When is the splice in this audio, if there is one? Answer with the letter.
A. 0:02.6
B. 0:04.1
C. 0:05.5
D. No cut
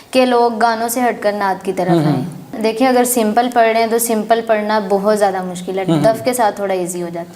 A